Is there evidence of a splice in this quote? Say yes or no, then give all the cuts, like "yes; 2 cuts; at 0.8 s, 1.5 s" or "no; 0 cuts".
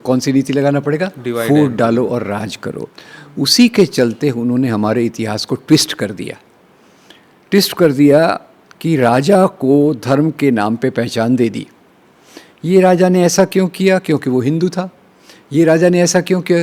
no; 0 cuts